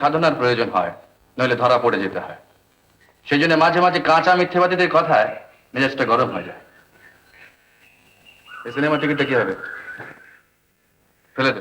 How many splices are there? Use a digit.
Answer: 0